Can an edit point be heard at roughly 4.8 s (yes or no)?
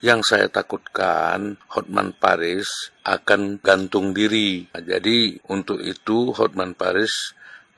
yes